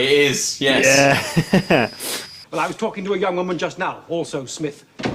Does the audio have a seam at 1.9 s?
yes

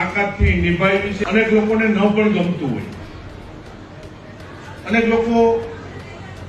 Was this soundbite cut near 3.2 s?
no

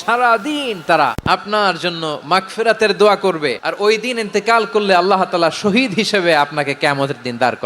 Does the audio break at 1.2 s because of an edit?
yes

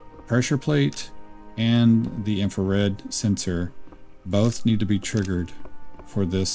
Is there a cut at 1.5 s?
no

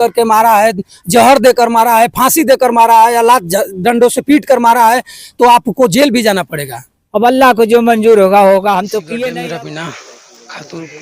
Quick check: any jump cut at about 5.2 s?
no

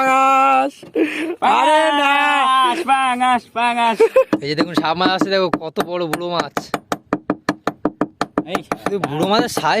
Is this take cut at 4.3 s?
yes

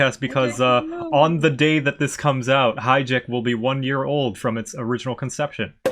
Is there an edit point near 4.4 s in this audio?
no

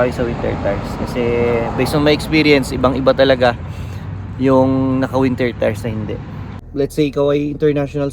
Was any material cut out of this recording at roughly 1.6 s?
no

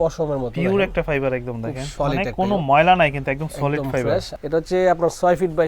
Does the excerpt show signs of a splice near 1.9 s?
yes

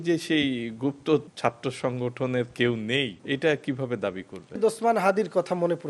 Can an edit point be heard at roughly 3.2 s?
yes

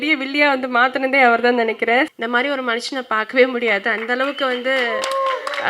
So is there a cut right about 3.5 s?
no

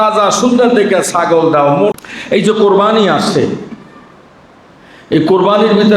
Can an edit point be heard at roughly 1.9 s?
yes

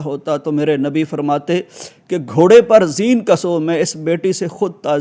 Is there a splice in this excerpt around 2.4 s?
no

